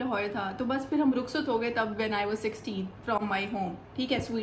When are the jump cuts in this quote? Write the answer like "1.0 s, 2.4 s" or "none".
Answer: none